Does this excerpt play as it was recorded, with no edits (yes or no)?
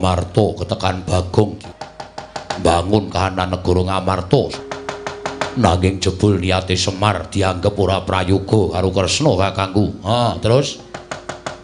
no